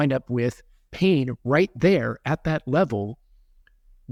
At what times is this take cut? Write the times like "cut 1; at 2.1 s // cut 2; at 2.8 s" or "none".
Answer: none